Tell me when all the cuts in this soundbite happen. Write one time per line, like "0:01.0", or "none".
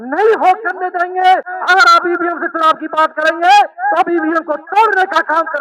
0:01.5